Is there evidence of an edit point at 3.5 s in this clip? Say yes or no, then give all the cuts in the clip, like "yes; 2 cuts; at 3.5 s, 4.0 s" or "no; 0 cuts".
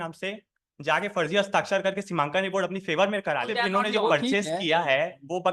yes; 1 cut; at 3.5 s